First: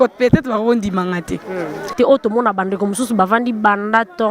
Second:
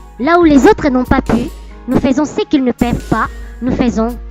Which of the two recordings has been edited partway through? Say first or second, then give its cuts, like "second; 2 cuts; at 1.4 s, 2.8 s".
first; 1 cut; at 1.9 s